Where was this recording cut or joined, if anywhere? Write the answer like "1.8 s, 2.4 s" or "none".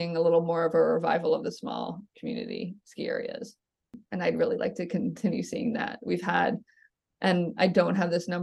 none